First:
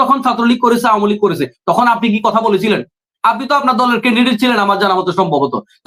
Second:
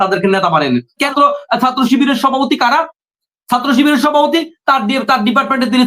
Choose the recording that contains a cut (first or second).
second